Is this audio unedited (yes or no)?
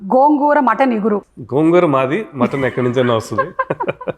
no